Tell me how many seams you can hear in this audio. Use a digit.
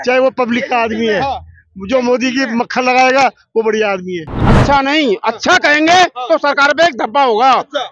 1